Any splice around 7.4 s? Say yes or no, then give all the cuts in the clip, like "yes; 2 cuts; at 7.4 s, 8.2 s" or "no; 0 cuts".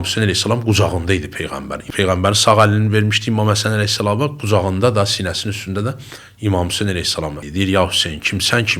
yes; 1 cut; at 7.4 s